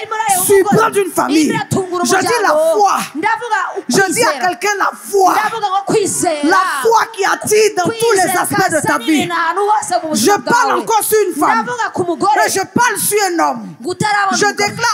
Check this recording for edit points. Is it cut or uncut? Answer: uncut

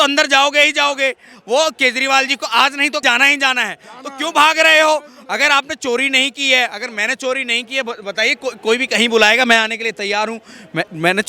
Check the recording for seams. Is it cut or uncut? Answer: cut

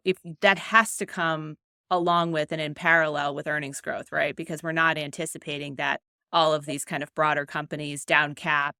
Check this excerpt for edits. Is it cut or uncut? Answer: uncut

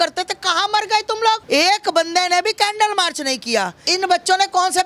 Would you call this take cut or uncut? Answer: cut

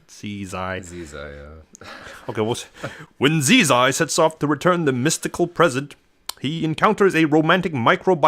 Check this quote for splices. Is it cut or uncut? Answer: uncut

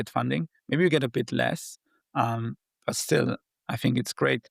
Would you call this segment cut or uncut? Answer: uncut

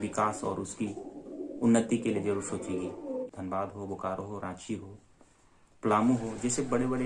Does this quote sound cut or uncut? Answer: cut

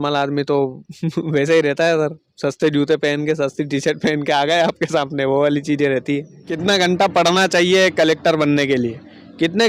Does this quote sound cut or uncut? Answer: cut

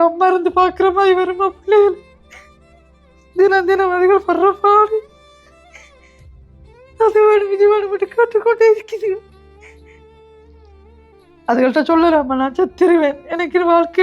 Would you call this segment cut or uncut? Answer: cut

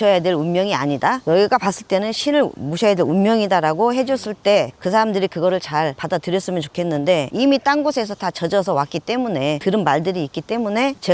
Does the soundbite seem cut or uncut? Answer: uncut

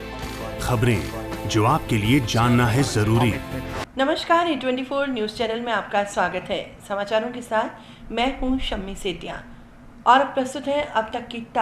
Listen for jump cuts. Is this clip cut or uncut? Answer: cut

